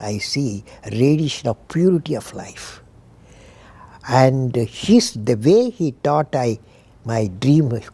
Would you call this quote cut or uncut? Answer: uncut